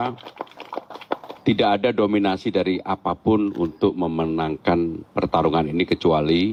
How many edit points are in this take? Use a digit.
0